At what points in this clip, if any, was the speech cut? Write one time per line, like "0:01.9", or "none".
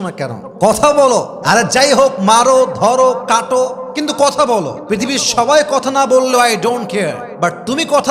none